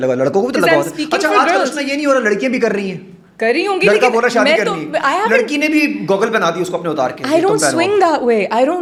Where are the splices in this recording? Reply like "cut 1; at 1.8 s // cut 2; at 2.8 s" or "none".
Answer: none

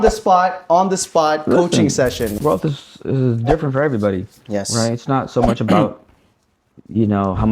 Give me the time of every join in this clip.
cut 1; at 2.4 s

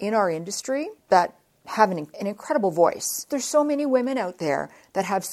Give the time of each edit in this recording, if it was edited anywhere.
cut 1; at 0.9 s // cut 2; at 2.1 s // cut 3; at 3.2 s

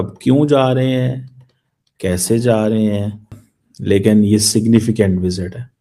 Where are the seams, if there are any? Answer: cut 1; at 3.4 s

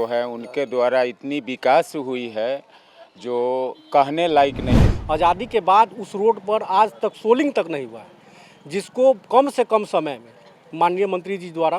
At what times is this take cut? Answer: cut 1; at 4.7 s

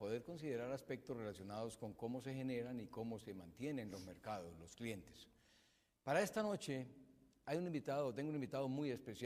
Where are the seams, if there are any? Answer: cut 1; at 5.7 s

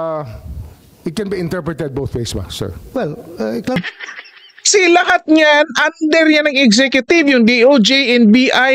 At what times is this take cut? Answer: cut 1; at 3.8 s

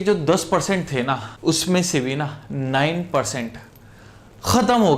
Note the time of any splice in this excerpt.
cut 1; at 1.3 s

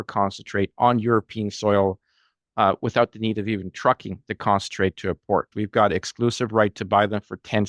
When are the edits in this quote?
cut 1; at 5.5 s

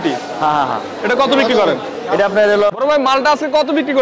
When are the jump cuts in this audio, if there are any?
cut 1; at 2.7 s

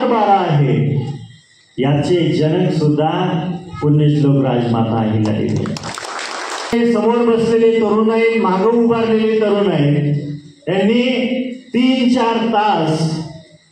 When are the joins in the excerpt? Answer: cut 1; at 6.7 s

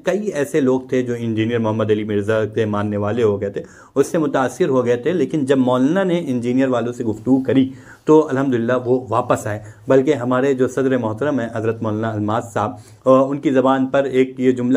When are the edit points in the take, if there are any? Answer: none

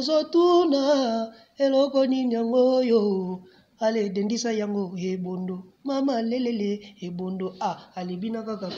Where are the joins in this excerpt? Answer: none

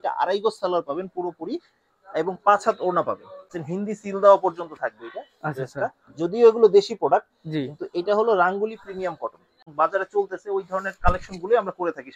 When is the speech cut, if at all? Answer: cut 1; at 3.6 s // cut 2; at 9.6 s

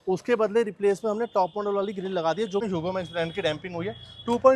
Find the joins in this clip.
cut 1; at 2.6 s

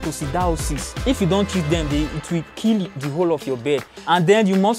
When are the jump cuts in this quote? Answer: cut 1; at 1.0 s // cut 2; at 3.0 s // cut 3; at 3.9 s

